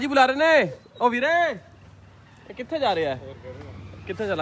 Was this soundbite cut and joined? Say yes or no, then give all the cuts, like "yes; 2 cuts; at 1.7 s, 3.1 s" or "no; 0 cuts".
no; 0 cuts